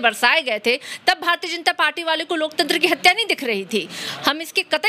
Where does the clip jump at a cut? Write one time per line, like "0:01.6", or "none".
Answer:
none